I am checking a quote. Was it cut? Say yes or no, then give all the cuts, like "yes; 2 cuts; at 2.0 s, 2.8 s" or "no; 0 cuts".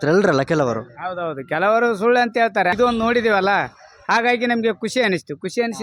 yes; 1 cut; at 2.7 s